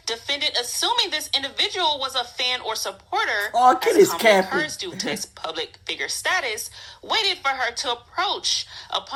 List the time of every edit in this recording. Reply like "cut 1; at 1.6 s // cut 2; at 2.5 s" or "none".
none